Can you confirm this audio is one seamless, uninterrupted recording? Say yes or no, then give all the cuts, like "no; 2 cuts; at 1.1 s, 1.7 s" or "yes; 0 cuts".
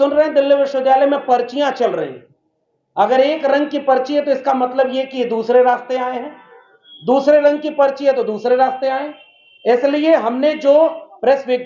yes; 0 cuts